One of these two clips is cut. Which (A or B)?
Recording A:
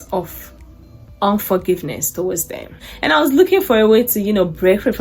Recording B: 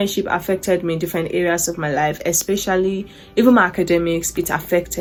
A